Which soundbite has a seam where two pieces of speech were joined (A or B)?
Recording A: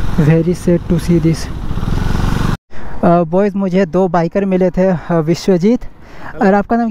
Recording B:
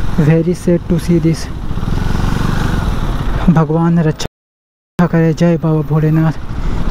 A